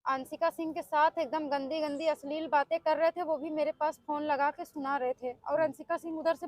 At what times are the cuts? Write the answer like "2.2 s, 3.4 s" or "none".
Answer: none